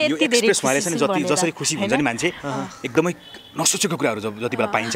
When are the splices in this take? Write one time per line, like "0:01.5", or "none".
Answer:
none